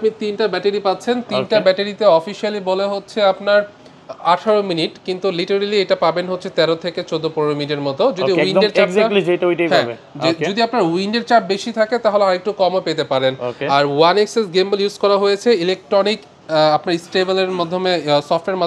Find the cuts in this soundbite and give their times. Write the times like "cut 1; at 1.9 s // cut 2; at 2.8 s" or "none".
none